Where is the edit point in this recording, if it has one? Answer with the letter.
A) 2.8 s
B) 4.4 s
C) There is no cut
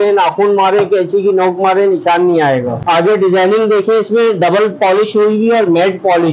A